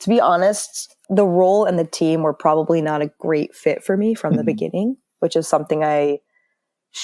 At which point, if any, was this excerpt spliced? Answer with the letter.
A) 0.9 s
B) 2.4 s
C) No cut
A